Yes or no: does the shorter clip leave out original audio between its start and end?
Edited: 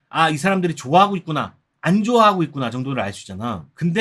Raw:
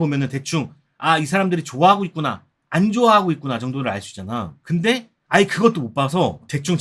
no